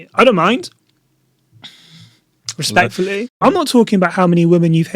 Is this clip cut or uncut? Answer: cut